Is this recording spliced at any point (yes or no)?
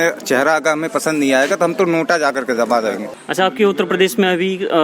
yes